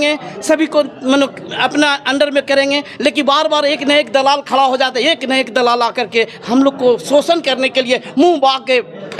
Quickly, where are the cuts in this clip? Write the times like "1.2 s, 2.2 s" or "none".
none